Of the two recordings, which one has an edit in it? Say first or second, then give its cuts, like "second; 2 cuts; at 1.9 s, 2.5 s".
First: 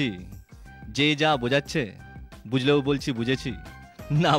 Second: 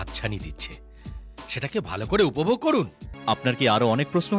second; 1 cut; at 3.0 s